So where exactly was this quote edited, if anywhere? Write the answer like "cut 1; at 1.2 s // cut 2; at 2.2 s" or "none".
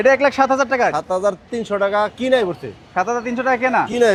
none